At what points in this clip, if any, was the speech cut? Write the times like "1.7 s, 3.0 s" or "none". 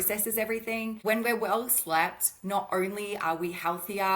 1.0 s